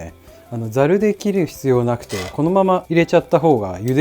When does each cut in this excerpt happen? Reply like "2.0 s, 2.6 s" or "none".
2.9 s